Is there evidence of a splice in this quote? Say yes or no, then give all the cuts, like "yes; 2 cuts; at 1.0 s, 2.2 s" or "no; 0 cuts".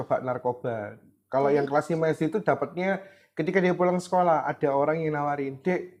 no; 0 cuts